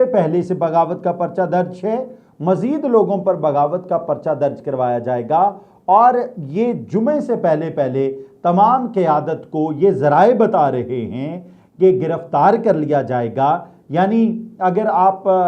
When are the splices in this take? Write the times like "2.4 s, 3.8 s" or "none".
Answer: none

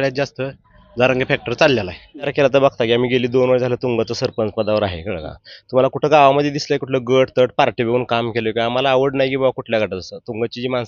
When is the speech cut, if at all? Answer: 2.3 s

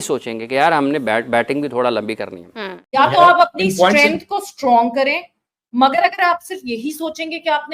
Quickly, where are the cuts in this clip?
2.8 s

